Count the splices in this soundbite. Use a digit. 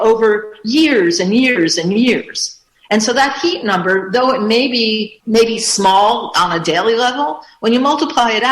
1